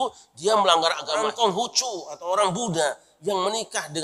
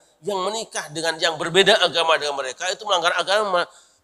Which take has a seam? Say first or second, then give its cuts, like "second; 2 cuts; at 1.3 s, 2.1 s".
first; 1 cut; at 1.1 s